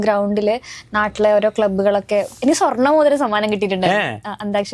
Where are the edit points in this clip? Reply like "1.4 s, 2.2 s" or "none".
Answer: 2.4 s